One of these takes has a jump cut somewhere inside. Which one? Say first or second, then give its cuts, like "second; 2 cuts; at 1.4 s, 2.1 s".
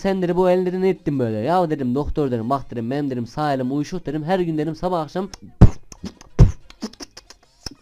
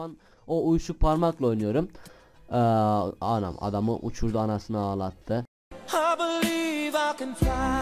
first; 1 cut; at 5.4 s